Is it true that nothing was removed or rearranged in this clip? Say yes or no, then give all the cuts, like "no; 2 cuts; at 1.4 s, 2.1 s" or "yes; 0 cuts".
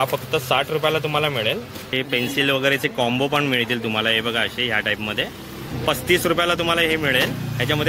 no; 2 cuts; at 1.9 s, 5.7 s